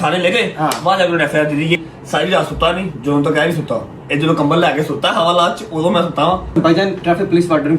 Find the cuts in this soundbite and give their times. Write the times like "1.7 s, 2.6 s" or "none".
1.8 s, 6.5 s